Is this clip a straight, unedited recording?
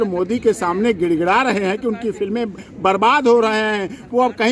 yes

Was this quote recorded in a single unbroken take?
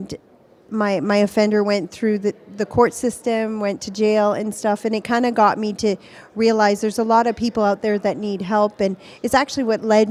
yes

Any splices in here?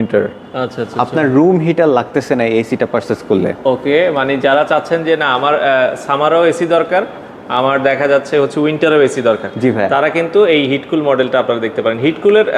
no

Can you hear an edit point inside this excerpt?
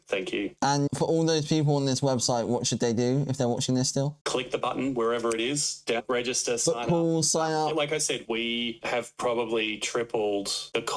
no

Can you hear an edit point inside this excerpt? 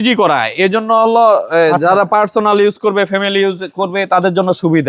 no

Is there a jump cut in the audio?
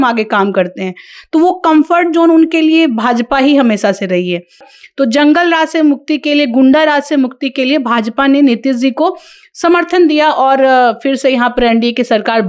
yes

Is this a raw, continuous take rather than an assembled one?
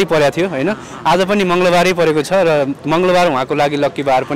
yes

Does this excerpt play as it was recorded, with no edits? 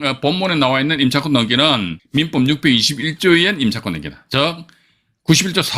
no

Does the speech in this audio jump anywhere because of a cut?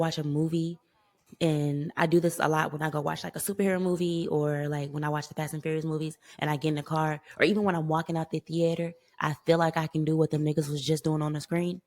no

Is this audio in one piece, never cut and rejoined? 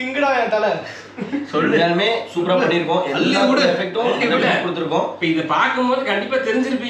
yes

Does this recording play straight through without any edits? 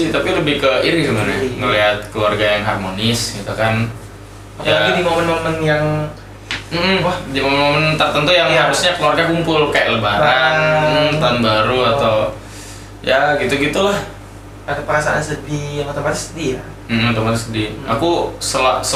yes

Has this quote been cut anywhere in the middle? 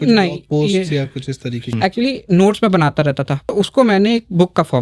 yes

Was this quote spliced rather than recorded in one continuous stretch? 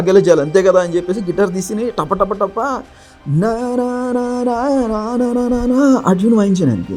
no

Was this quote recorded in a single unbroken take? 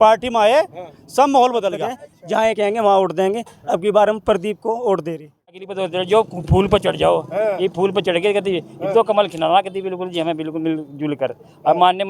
no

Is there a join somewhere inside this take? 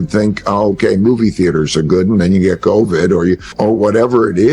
yes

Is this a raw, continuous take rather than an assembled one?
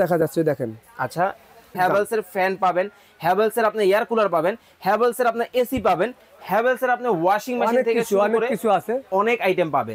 no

